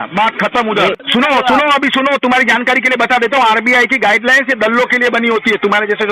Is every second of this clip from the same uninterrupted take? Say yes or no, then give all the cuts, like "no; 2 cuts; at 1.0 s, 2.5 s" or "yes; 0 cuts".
no; 1 cut; at 1.0 s